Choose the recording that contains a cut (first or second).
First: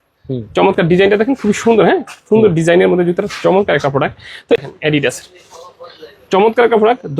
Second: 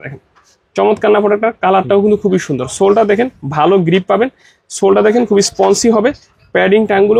first